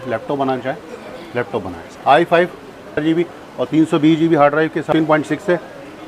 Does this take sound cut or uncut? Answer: cut